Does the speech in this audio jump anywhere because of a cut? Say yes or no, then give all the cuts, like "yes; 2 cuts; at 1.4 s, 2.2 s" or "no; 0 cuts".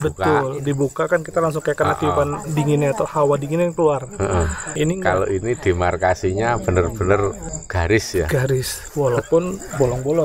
yes; 1 cut; at 4.7 s